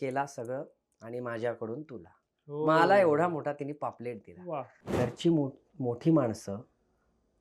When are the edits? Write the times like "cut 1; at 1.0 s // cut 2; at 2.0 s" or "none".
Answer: cut 1; at 4.8 s